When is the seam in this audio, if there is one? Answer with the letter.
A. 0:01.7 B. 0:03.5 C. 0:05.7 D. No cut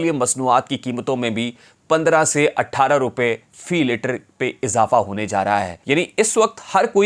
C